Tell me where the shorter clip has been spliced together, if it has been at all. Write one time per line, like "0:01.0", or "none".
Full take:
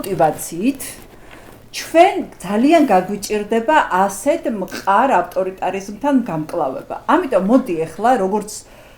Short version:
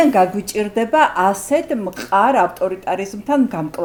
none